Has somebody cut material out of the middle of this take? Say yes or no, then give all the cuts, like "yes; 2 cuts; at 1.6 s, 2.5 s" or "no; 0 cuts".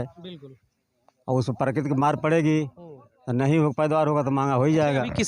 no; 0 cuts